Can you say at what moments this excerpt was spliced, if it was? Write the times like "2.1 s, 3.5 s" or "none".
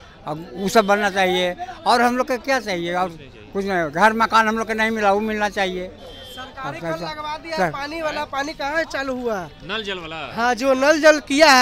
none

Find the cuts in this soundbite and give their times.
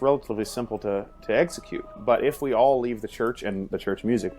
1.9 s

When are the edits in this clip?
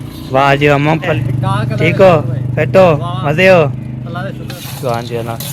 1.1 s, 4.6 s

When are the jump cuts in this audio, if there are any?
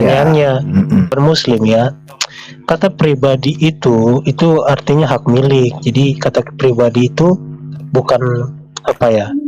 1.1 s

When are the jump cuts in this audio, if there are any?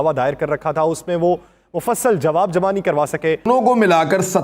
3.4 s

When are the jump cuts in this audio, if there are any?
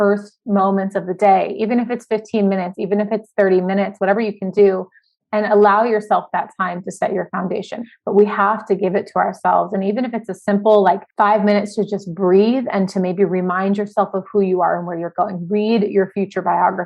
7.8 s, 11.1 s

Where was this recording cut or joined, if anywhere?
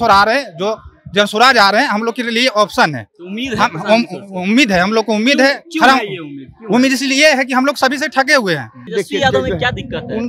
8.7 s

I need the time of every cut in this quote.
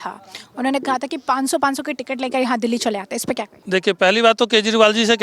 3.5 s

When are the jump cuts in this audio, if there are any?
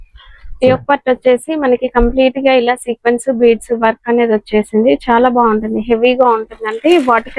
none

